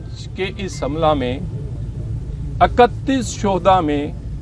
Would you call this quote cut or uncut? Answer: uncut